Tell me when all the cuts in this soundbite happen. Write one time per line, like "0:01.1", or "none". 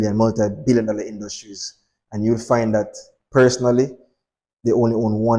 none